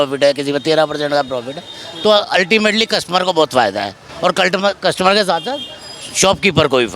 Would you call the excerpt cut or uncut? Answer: uncut